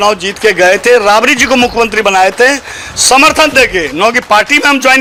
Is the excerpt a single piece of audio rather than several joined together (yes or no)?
yes